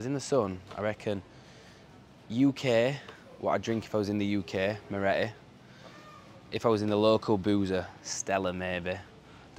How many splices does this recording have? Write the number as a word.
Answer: zero